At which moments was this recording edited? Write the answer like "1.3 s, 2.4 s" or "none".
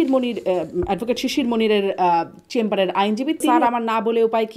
3.5 s